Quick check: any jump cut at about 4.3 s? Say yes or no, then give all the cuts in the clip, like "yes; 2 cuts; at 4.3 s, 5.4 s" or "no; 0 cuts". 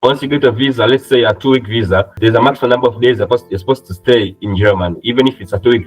no; 1 cut; at 2.2 s